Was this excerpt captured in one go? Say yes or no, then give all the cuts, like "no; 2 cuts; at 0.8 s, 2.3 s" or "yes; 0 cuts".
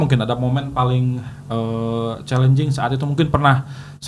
yes; 0 cuts